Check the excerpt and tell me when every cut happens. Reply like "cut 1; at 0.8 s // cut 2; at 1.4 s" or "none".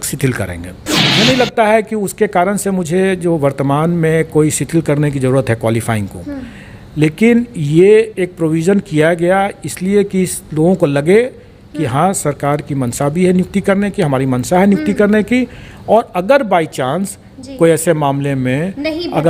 cut 1; at 1.0 s